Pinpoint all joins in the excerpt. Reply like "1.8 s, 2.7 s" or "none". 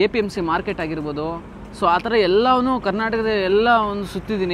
none